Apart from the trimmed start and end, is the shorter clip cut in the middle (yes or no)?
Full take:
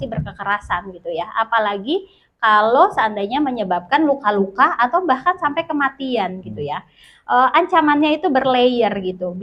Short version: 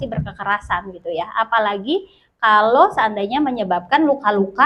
no